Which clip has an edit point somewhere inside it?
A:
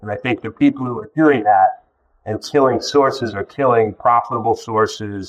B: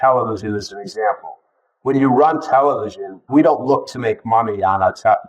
B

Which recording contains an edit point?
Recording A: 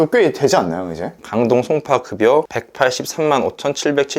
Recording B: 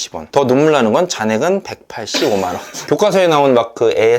B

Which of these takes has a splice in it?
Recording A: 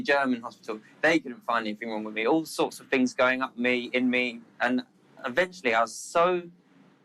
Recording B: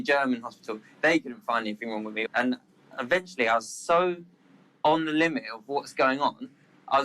B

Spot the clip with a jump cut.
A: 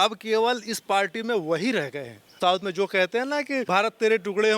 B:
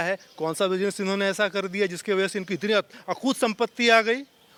A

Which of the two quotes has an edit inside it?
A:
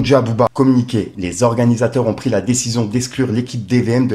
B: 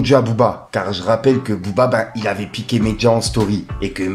A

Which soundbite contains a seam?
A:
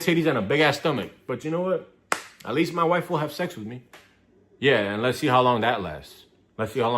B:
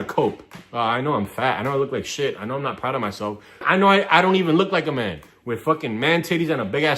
B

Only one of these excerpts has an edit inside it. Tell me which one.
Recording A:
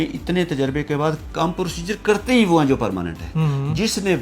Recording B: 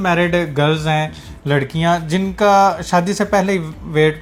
A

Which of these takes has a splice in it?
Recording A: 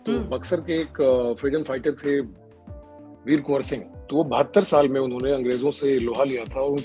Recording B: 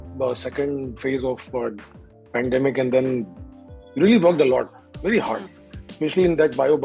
A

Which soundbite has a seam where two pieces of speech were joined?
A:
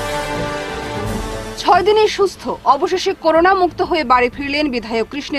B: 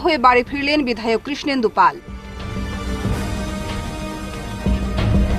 A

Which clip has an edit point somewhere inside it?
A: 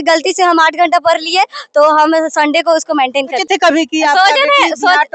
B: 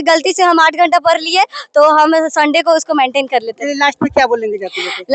A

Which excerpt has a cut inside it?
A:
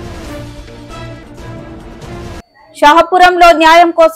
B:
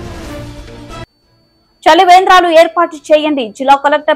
B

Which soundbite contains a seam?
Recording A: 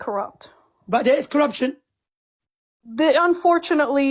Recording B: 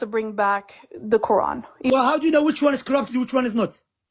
B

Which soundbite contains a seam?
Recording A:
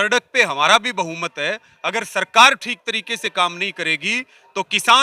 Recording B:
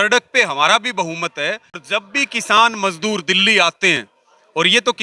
B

